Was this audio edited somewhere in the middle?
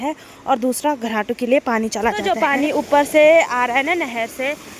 yes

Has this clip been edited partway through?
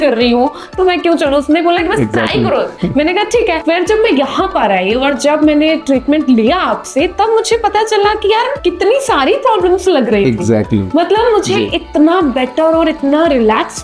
no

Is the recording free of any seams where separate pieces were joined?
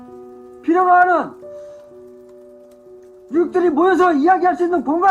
no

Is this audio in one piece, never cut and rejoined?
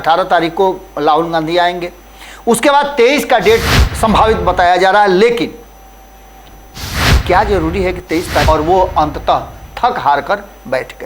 no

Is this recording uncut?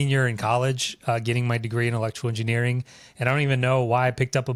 yes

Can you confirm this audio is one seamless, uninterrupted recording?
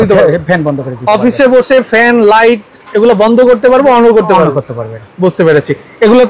yes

